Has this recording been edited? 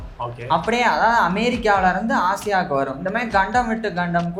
no; 0 cuts

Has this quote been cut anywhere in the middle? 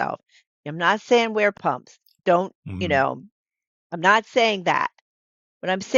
no; 0 cuts

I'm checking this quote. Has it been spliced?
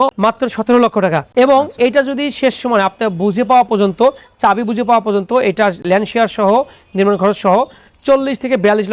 no; 0 cuts

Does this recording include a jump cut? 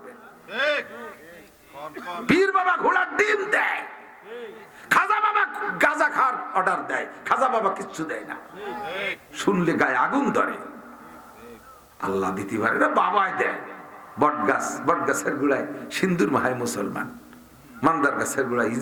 no; 0 cuts

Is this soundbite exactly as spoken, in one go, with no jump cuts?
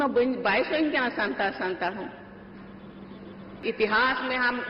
no; 1 cut; at 3.5 s

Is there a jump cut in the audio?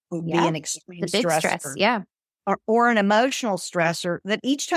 no; 0 cuts

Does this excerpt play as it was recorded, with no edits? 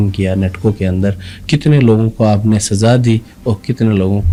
yes; 0 cuts

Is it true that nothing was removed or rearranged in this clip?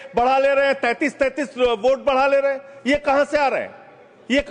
yes; 0 cuts

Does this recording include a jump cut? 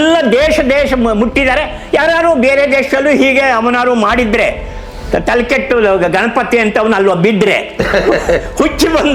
no; 0 cuts

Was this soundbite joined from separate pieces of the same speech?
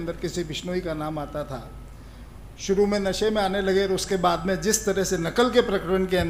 no; 0 cuts

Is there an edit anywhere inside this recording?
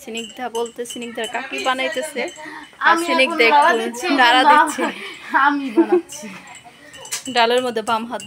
no; 0 cuts

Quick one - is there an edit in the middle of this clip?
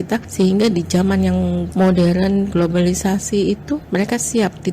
no; 0 cuts

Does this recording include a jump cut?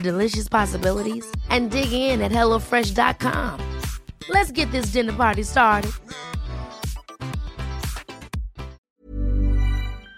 yes; 1 cut; at 8.8 s

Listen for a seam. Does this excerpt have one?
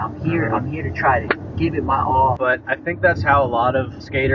yes; 1 cut; at 2.4 s

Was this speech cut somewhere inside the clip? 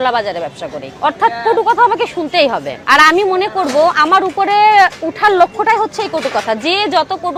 no; 0 cuts

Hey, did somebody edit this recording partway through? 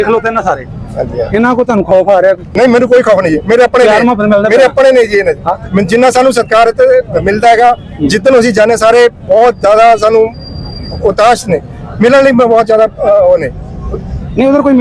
yes; 1 cut; at 2.5 s

